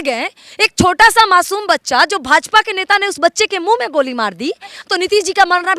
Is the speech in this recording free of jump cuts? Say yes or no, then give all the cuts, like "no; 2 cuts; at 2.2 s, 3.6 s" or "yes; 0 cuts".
no; 1 cut; at 4.8 s